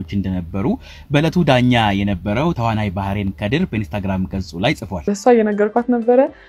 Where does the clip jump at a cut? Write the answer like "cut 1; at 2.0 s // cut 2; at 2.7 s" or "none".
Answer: cut 1; at 5.0 s